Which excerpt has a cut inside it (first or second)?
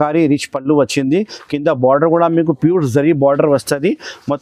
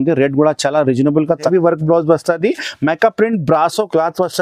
second